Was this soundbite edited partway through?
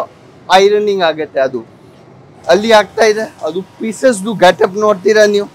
no; 0 cuts

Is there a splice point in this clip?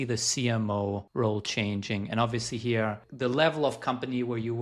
yes; 2 cuts; at 1.1 s, 3.0 s

